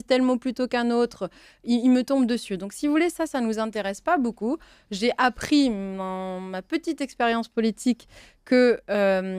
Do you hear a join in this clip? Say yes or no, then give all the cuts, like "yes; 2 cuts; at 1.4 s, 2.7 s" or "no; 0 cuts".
no; 0 cuts